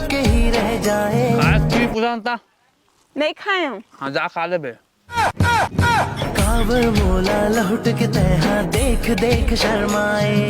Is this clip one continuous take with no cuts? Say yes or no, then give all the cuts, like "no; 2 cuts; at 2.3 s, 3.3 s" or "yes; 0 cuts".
no; 1 cut; at 6.2 s